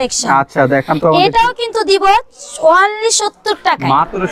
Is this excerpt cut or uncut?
uncut